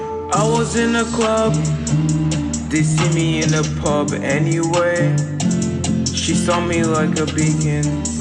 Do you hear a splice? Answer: no; 0 cuts

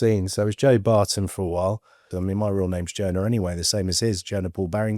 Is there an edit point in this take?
yes; 1 cut; at 2.1 s

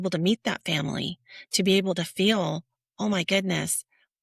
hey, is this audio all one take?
yes; 0 cuts

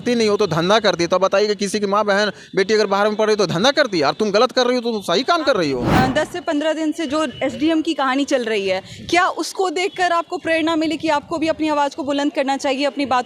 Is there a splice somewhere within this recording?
yes; 1 cut; at 5.9 s

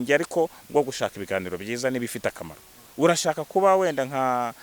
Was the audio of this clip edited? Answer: yes; 1 cut; at 2.8 s

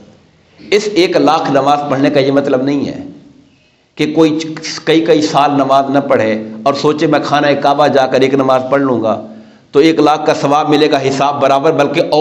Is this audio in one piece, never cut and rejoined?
yes; 0 cuts

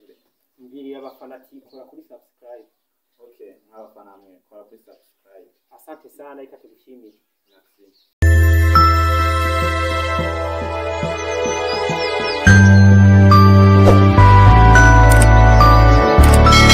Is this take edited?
yes; 1 cut; at 8.1 s

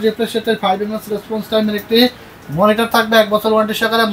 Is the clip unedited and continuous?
yes; 0 cuts

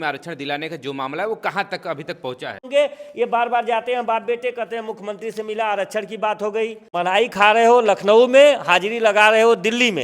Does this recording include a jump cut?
yes; 2 cuts; at 2.6 s, 6.8 s

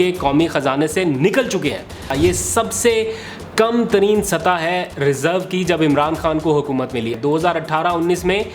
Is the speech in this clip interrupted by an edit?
yes; 2 cuts; at 2.1 s, 7.1 s

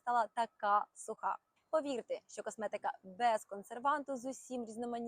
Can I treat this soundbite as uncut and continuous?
no; 1 cut; at 1.5 s

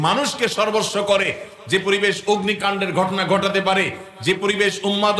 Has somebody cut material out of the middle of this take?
no; 0 cuts

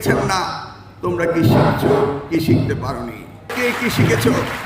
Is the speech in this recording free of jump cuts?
no; 1 cut; at 3.5 s

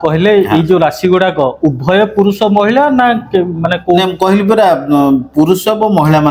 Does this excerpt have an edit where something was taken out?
no; 0 cuts

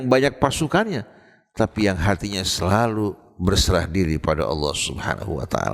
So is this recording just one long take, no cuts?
yes; 0 cuts

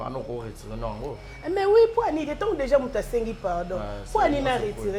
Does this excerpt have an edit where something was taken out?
no; 0 cuts

